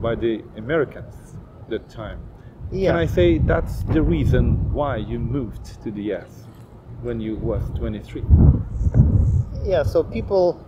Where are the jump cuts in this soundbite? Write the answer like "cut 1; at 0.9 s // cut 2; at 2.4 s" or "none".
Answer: none